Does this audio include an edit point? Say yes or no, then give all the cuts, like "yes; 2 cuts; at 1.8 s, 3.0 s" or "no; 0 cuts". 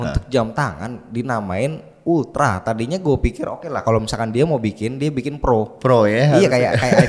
no; 0 cuts